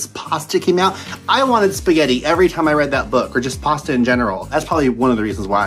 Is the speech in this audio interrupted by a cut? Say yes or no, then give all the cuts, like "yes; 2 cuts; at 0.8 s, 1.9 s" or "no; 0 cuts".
yes; 1 cut; at 4.4 s